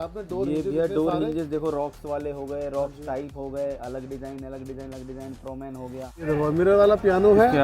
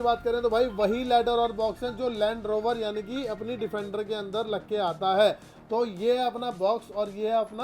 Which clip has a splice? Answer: first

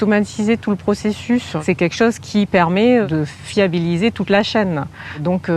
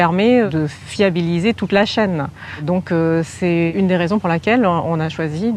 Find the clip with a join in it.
first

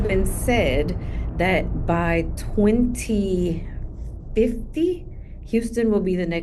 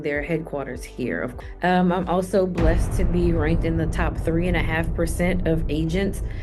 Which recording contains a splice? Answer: second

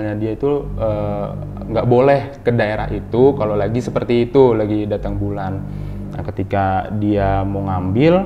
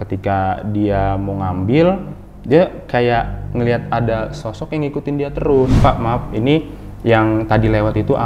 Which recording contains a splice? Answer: second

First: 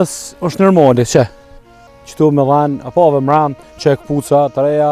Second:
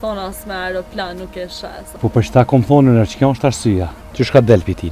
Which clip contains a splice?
second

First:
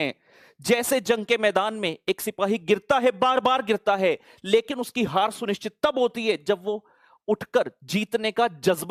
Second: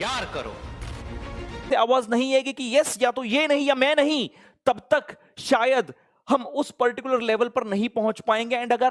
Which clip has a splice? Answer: second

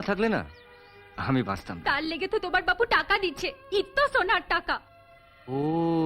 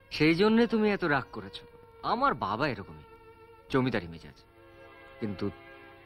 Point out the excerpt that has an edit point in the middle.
first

